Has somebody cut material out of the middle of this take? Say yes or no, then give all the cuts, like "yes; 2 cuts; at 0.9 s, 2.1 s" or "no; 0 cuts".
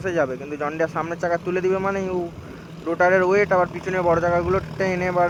no; 0 cuts